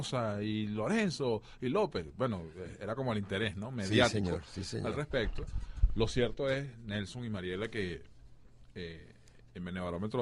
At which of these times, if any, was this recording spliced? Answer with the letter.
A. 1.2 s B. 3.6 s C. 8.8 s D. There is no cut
A